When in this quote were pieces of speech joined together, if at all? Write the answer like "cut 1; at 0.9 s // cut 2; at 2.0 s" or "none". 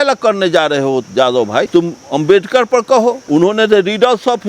cut 1; at 1.7 s // cut 2; at 3.2 s